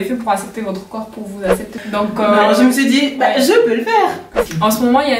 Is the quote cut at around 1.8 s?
yes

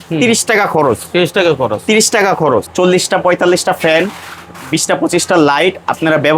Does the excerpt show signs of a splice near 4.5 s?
no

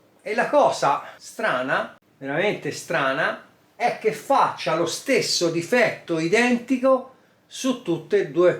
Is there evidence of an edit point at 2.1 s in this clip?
yes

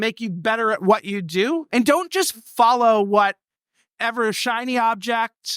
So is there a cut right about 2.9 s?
no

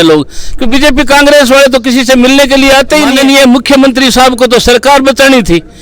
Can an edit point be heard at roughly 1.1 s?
no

